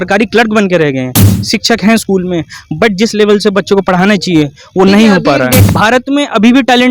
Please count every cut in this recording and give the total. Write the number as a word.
two